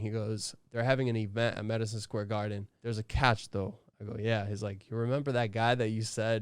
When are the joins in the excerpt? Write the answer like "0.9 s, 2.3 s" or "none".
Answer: 2.7 s